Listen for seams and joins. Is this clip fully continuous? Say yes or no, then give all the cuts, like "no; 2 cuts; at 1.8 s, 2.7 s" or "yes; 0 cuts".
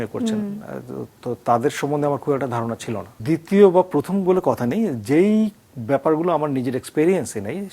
no; 1 cut; at 3.2 s